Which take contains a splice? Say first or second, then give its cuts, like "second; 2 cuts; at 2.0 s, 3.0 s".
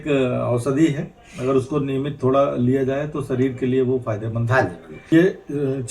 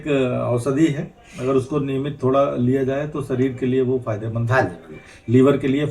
first; 1 cut; at 5.0 s